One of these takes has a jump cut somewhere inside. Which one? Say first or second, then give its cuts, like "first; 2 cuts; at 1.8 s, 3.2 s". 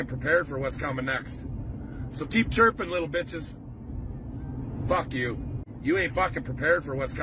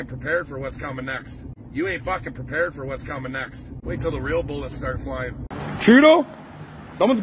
second; 2 cuts; at 1.5 s, 3.6 s